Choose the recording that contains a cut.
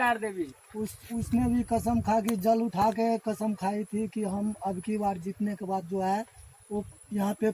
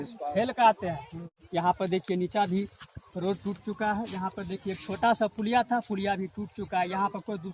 second; 1 cut; at 1.4 s

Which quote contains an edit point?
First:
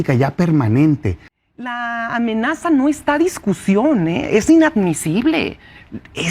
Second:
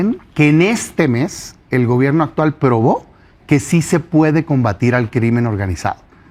first; 1 cut; at 1.3 s

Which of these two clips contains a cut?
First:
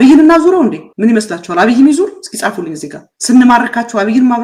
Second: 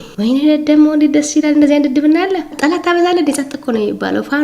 second; 1 cut; at 2.5 s

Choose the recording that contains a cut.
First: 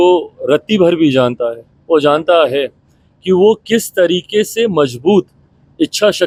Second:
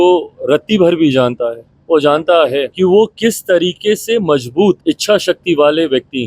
second; 2 cuts; at 2.7 s, 4.8 s

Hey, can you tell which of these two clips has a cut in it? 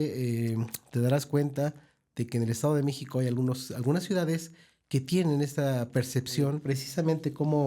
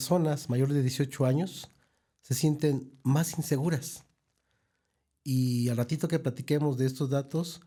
first; 1 cut; at 6.6 s

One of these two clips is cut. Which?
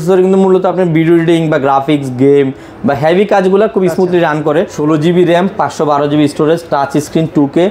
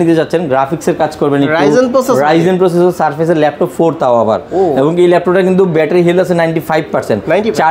first; 1 cut; at 4.7 s

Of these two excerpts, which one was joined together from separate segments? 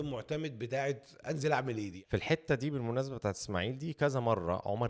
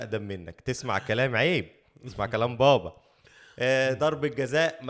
first; 1 cut; at 2.0 s

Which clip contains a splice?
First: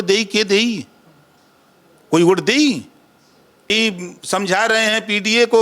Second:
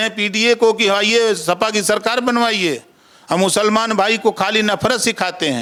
first; 1 cut; at 3.7 s

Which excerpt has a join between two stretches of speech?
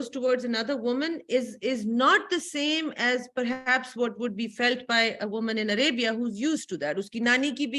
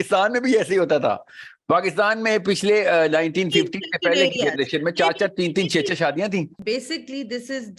second; 1 cut; at 6.5 s

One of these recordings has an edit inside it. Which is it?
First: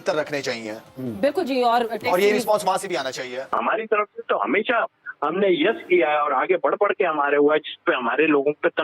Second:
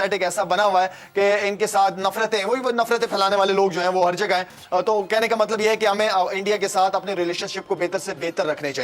first; 1 cut; at 3.5 s

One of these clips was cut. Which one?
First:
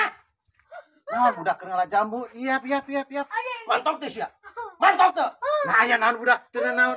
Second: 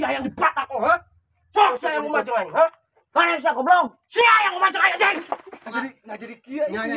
second; 1 cut; at 5.5 s

